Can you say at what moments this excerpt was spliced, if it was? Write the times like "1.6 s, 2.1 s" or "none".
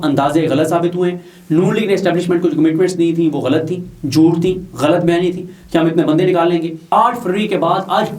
6.8 s